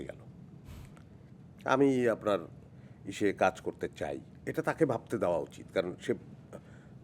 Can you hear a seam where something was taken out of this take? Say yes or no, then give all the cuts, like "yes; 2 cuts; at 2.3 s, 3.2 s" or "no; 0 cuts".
yes; 1 cut; at 1.3 s